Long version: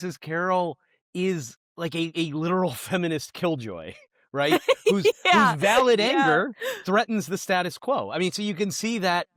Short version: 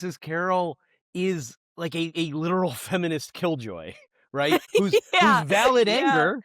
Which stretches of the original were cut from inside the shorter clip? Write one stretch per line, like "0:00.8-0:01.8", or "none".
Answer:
0:04.7-0:04.8